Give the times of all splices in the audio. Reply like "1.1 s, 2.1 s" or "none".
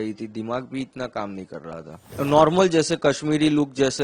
2.1 s